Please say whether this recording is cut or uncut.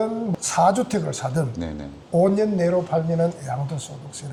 uncut